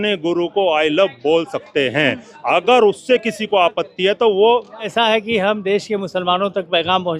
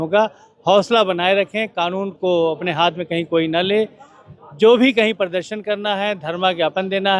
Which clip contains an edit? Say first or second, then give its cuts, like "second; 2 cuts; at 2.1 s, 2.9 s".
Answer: first; 1 cut; at 4.9 s